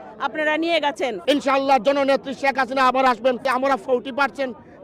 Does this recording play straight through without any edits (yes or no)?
no